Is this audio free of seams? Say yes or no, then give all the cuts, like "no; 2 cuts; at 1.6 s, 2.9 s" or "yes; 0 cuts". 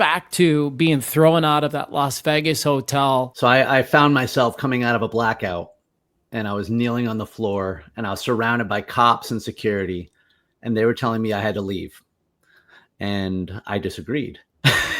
no; 1 cut; at 3.3 s